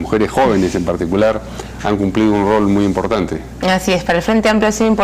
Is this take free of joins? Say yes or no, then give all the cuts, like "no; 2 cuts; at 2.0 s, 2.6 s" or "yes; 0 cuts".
no; 1 cut; at 3.2 s